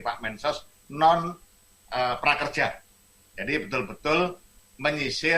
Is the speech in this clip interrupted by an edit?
no; 0 cuts

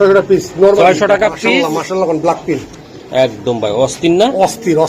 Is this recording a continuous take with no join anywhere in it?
no; 1 cut; at 1.5 s

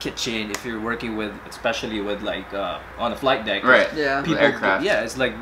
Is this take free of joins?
yes; 0 cuts

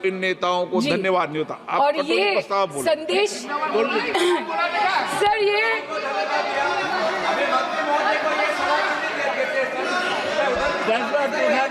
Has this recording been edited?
no; 0 cuts

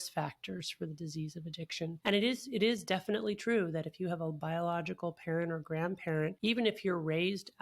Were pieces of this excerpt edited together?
yes; 2 cuts; at 2.0 s, 6.4 s

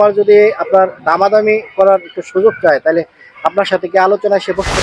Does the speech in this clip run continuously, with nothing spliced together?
yes; 0 cuts

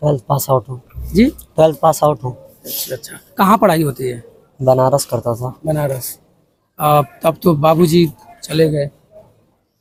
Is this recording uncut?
yes; 0 cuts

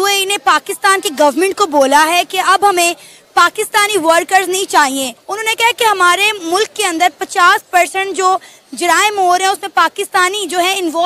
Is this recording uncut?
yes; 0 cuts

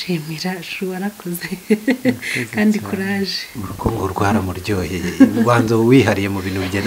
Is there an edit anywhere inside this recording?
no; 0 cuts

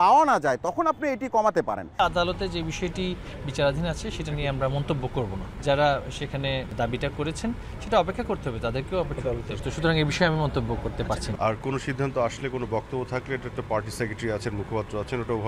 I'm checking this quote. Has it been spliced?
yes; 5 cuts; at 2.0 s, 5.5 s, 6.7 s, 9.5 s, 11.3 s

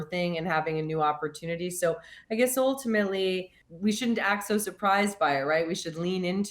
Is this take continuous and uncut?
no; 1 cut; at 3.5 s

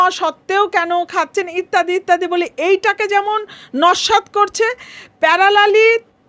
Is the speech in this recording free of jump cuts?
yes; 0 cuts

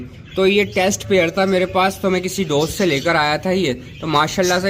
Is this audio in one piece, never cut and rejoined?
yes; 0 cuts

